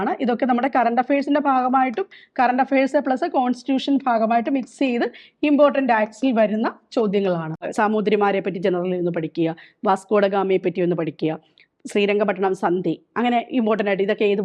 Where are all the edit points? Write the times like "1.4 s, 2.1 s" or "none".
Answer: 7.6 s

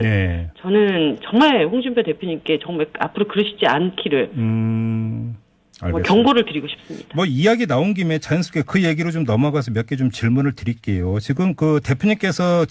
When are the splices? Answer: 2.7 s

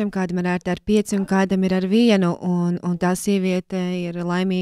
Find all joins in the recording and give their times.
none

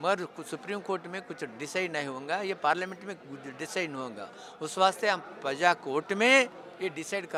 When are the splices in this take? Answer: none

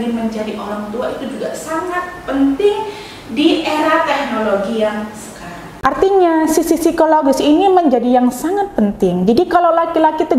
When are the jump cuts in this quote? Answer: 5.7 s

